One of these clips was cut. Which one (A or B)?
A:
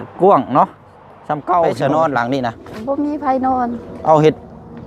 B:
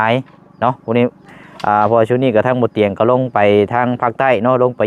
A